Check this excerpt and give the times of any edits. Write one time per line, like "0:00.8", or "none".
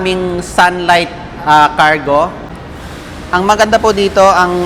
0:02.5